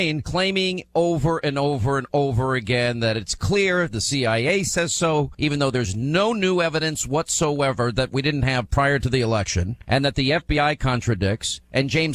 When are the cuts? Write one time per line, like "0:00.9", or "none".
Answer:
0:02.2